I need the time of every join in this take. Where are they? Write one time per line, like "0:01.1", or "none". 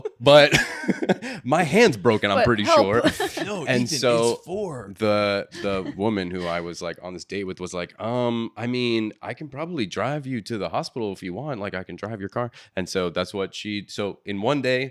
none

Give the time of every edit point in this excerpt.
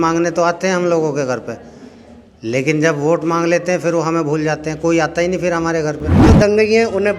0:06.1

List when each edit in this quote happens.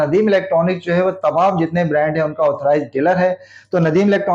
none

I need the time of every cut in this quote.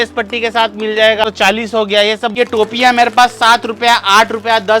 0:01.2
0:02.3

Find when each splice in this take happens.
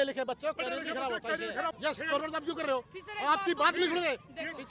0:01.7

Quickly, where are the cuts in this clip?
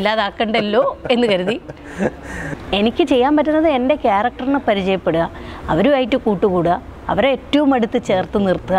0:02.6

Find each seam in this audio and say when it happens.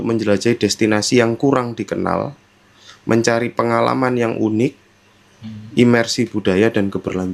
none

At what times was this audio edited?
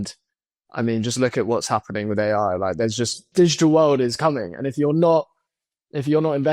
0:03.3

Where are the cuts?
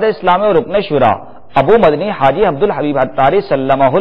none

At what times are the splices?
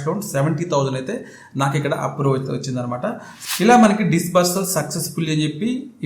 0:03.3

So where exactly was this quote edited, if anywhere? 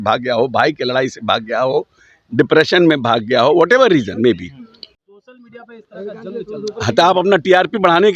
0:04.9

